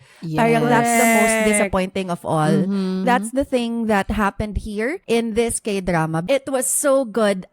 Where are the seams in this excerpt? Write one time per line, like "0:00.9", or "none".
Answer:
0:03.0
0:05.0
0:06.2